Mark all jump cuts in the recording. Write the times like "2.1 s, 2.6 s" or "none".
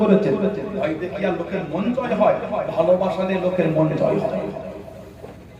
none